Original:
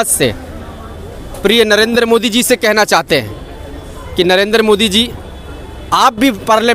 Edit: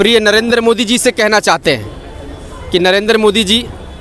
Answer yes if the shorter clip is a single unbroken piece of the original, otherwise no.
yes